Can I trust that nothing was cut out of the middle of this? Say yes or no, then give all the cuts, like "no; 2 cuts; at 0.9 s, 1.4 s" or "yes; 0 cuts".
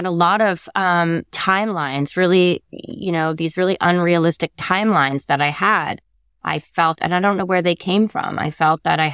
yes; 0 cuts